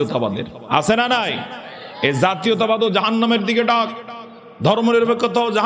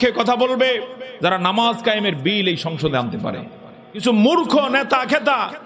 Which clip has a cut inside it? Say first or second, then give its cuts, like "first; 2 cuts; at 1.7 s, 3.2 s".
second; 1 cut; at 4.0 s